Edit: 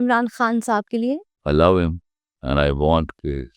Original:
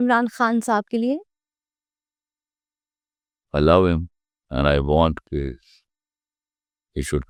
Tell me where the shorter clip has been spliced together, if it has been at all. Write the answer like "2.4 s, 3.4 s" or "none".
1.3 s